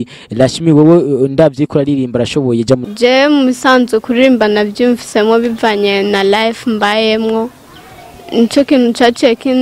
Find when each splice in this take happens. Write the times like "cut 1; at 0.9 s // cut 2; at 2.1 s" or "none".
cut 1; at 2.9 s